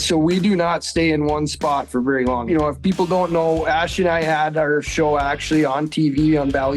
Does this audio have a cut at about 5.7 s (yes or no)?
no